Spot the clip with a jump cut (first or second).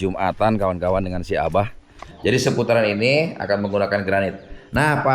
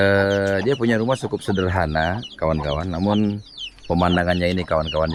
first